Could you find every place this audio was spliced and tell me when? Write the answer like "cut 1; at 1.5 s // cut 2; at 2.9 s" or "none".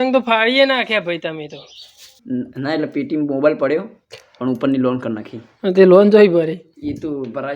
cut 1; at 2.2 s